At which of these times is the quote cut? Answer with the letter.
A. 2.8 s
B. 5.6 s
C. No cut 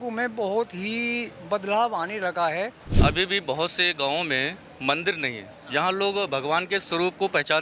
A